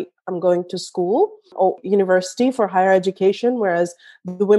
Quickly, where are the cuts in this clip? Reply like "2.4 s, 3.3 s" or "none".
1.7 s